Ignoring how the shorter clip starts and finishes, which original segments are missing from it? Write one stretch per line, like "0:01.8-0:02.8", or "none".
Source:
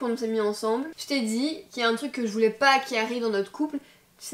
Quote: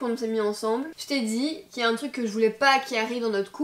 none